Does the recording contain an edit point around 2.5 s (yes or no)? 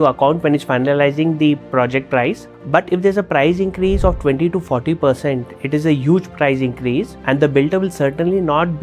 yes